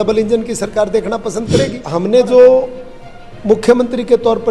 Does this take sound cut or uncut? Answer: cut